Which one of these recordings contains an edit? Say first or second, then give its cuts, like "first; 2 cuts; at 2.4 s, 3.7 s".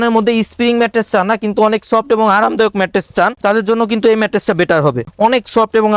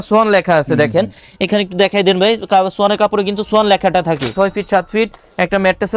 second; 1 cut; at 4.3 s